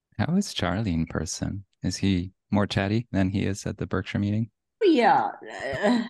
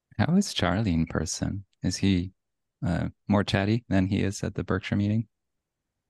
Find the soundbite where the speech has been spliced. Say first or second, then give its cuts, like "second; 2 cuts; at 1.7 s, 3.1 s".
first; 2 cuts; at 2.4 s, 4.8 s